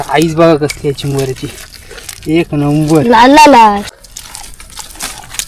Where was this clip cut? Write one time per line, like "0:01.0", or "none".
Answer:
0:04.0